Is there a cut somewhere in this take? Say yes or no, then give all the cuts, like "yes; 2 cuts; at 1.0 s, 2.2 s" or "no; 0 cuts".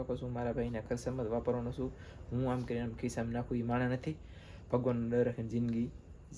no; 0 cuts